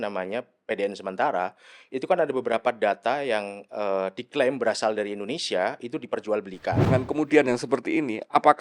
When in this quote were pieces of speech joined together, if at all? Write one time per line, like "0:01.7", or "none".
0:06.8